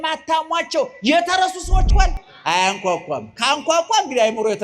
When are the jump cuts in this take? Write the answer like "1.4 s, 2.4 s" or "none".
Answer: 1.9 s